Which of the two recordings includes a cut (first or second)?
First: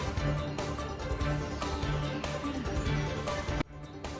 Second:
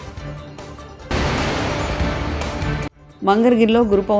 second